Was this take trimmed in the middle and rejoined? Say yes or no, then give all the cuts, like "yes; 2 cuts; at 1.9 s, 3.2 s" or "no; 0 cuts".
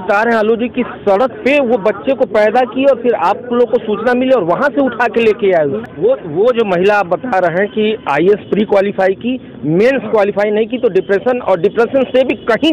yes; 1 cut; at 5.8 s